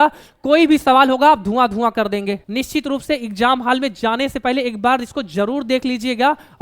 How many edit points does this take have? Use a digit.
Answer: 1